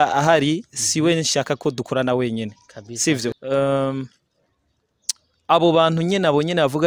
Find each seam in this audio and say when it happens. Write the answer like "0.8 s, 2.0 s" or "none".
3.3 s